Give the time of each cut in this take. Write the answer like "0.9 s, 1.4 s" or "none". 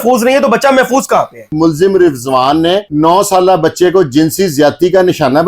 1.5 s